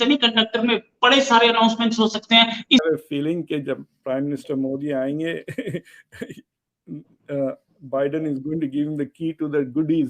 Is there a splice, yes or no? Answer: yes